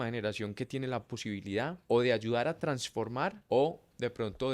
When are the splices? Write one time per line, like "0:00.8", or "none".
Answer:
0:01.8
0:03.4